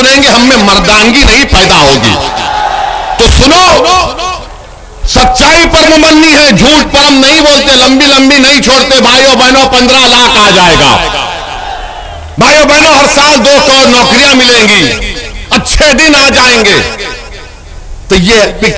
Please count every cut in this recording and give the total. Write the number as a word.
zero